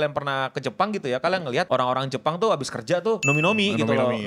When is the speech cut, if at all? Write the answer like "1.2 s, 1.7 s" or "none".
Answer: 1.7 s, 3.2 s